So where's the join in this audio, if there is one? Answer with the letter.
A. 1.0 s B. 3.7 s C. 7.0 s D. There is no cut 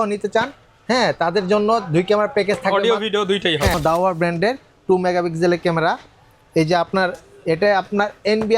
B